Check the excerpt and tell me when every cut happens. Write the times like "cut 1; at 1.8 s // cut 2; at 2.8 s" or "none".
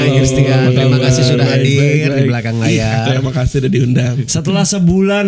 none